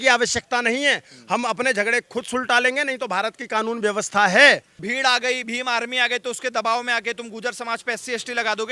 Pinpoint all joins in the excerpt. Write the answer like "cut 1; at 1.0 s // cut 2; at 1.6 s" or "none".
cut 1; at 4.8 s